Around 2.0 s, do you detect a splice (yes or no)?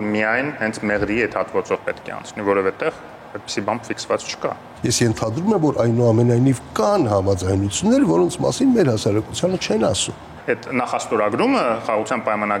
no